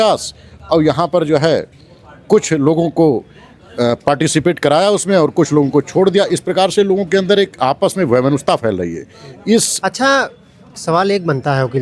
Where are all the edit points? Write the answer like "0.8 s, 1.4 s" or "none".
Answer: 9.7 s